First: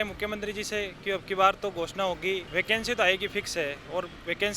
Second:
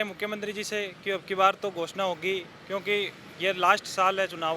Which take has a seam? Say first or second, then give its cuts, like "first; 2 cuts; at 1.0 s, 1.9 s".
first; 1 cut; at 2.5 s